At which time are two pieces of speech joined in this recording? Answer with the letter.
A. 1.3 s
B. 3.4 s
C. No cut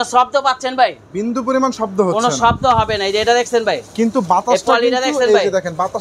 C